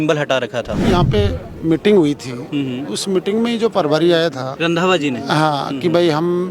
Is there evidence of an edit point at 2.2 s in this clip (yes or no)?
no